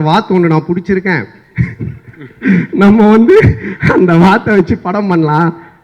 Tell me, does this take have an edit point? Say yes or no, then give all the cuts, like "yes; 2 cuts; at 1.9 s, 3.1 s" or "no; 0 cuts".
no; 0 cuts